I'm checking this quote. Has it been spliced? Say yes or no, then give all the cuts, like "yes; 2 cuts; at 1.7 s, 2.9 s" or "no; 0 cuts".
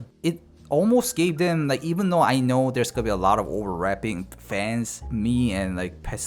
yes; 1 cut; at 5.0 s